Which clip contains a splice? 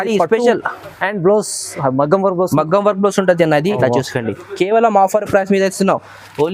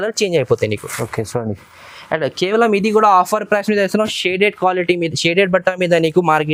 first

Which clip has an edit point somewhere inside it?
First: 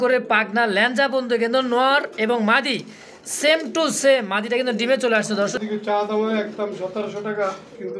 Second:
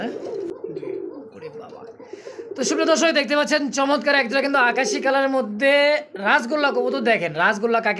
first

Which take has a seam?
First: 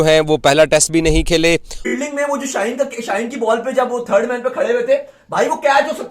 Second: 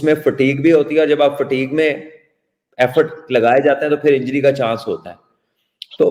first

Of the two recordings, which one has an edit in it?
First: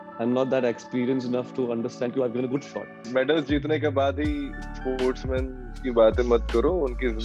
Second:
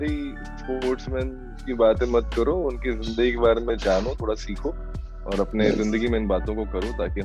first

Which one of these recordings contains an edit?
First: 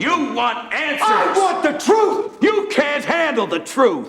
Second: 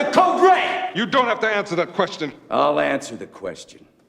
second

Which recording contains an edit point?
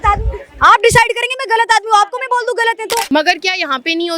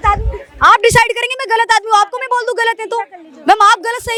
first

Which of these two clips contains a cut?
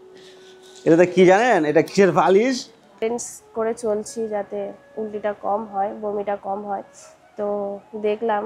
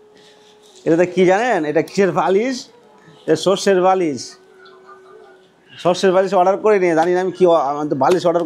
first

